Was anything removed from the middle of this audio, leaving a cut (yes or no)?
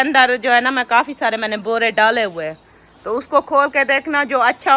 no